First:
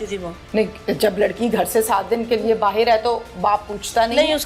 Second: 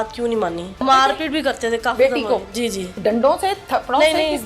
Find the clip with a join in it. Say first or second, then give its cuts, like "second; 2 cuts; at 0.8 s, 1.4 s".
second; 2 cuts; at 0.8 s, 3.0 s